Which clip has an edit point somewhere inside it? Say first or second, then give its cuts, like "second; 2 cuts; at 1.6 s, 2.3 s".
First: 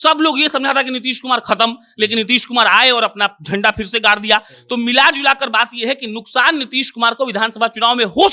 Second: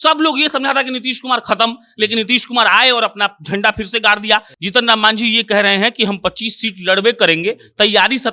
second; 1 cut; at 4.5 s